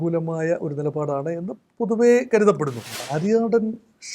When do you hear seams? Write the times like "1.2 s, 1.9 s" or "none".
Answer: 2.9 s